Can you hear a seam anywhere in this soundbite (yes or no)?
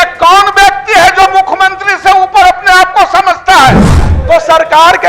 yes